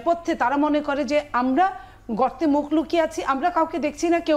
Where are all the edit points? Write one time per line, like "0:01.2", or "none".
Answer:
none